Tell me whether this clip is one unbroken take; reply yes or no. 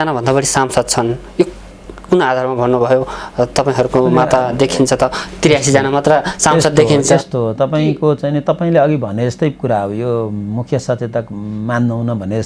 yes